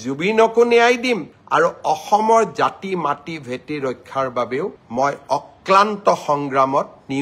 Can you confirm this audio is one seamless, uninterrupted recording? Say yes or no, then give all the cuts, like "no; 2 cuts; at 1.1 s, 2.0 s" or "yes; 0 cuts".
yes; 0 cuts